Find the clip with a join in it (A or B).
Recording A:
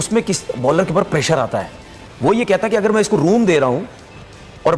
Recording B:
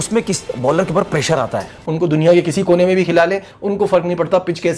B